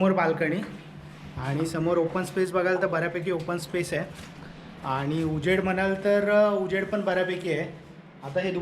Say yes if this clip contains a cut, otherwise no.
no